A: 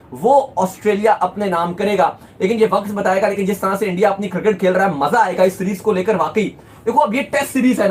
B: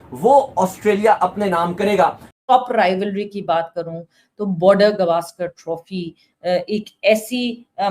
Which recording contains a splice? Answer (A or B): B